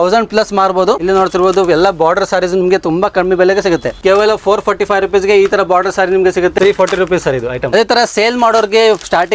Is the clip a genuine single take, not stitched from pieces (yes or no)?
no